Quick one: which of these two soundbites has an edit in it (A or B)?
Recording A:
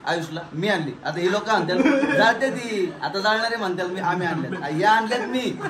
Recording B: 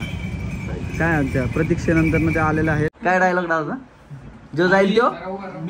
B